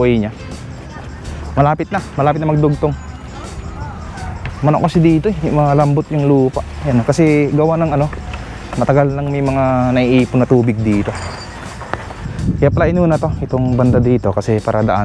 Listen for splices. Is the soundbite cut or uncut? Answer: cut